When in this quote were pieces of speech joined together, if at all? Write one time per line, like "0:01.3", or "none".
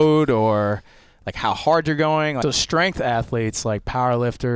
0:02.4